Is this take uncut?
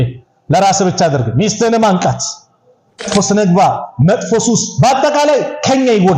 no; 1 cut; at 3.1 s

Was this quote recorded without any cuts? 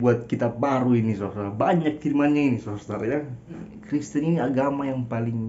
no; 1 cut; at 3.7 s

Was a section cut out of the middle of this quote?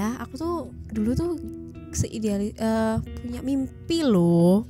no; 0 cuts

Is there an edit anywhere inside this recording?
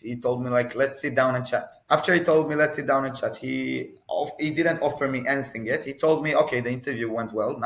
yes; 1 cut; at 1.7 s

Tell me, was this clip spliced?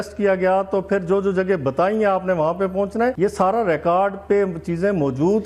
yes; 1 cut; at 3.2 s

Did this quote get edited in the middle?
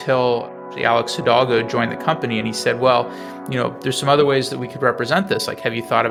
no; 0 cuts

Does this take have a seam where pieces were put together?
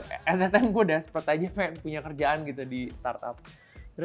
no; 0 cuts

